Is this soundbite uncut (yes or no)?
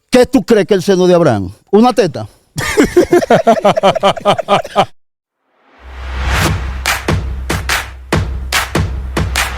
no